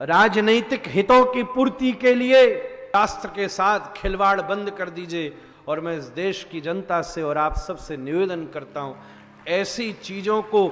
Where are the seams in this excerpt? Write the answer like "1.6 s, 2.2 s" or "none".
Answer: 2.9 s